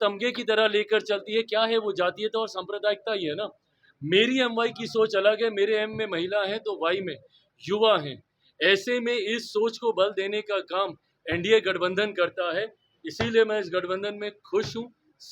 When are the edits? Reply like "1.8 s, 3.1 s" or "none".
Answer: none